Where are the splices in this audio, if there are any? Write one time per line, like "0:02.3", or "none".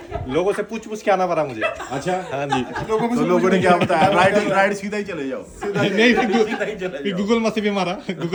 none